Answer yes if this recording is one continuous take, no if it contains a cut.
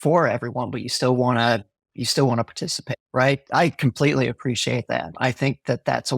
no